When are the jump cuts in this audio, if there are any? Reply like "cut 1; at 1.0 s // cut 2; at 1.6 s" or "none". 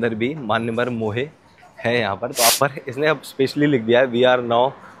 cut 1; at 2.5 s

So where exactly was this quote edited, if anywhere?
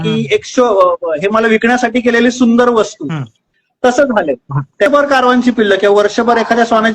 cut 1; at 4.9 s

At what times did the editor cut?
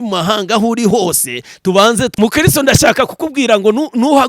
cut 1; at 2.1 s

